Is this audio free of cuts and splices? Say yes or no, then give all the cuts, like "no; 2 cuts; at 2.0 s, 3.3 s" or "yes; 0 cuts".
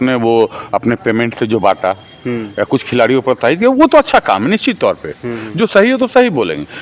yes; 0 cuts